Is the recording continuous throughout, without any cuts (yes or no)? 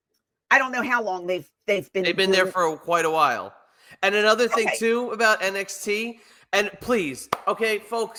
yes